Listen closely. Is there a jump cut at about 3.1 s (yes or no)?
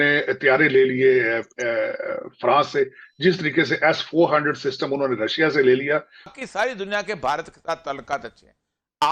no